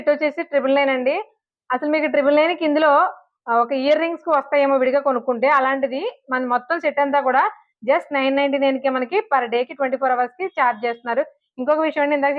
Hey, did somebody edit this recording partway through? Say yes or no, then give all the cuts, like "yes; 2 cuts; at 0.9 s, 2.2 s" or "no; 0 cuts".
no; 0 cuts